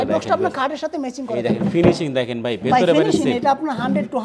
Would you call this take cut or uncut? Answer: uncut